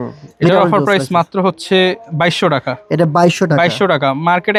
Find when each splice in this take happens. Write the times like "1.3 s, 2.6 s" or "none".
none